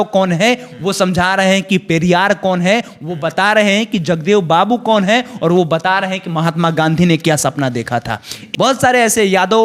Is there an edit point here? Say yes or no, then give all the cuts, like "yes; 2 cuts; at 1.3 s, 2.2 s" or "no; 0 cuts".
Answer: yes; 1 cut; at 8.4 s